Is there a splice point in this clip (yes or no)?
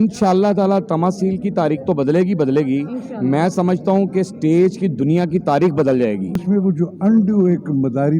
yes